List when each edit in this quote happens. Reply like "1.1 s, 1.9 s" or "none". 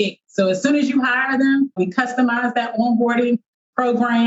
none